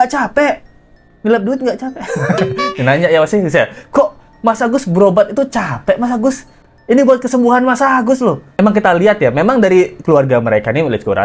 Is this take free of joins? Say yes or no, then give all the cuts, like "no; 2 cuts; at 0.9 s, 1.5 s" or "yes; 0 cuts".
yes; 0 cuts